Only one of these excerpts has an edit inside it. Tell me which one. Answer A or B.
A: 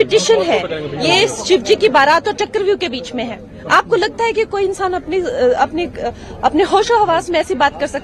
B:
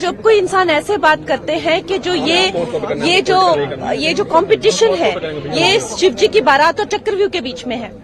B